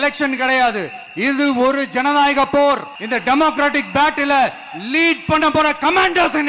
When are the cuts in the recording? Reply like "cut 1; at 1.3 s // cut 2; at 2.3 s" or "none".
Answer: none